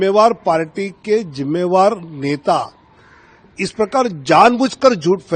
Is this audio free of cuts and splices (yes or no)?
yes